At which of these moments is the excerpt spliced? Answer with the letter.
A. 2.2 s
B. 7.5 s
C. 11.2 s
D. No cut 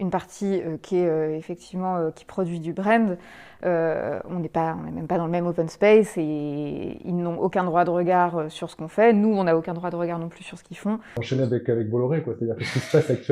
C